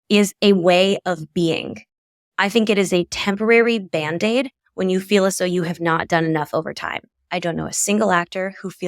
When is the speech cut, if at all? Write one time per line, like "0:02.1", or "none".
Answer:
0:07.3